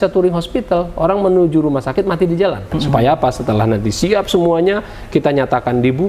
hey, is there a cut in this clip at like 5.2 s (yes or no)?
no